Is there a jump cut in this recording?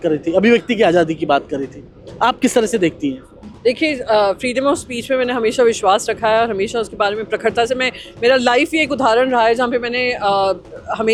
no; 0 cuts

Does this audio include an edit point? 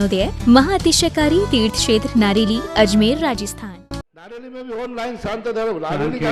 yes; 1 cut; at 4.0 s

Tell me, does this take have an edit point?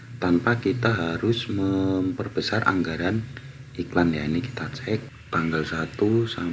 yes; 1 cut; at 5.2 s

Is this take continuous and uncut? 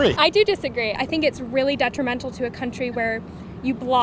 no; 1 cut; at 1.0 s

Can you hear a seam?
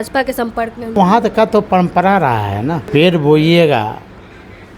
yes; 2 cuts; at 0.9 s, 2.8 s

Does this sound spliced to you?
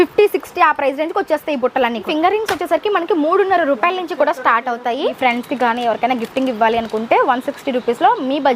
yes; 2 cuts; at 2.1 s, 5.2 s

